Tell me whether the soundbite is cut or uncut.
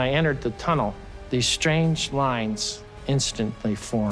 cut